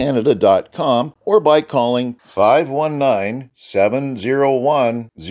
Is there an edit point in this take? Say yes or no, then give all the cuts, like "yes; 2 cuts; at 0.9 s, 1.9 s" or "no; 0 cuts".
yes; 1 cut; at 1.1 s